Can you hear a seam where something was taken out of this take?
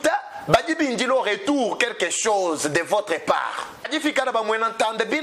yes; 1 cut; at 3.9 s

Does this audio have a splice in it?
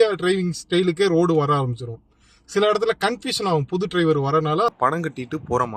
yes; 1 cut; at 4.7 s

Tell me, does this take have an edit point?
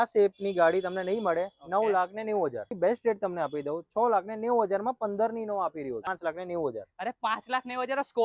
yes; 2 cuts; at 2.7 s, 6.1 s

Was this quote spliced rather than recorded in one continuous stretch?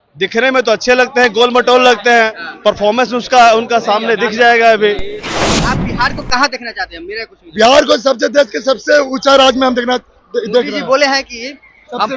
yes; 1 cut; at 5.6 s

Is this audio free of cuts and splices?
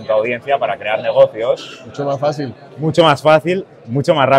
yes; 0 cuts

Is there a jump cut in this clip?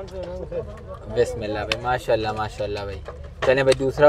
no; 0 cuts

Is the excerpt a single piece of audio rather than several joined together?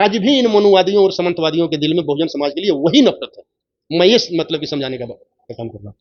yes; 0 cuts

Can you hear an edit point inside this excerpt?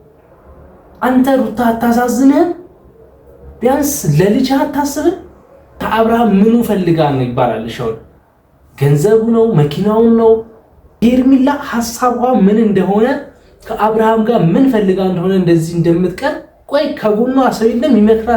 yes; 3 cuts; at 5.8 s, 11.0 s, 16.5 s

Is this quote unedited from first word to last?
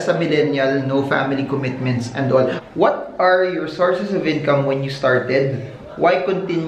no; 1 cut; at 2.6 s

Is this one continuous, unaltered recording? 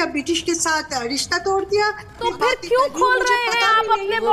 no; 1 cut; at 2.2 s

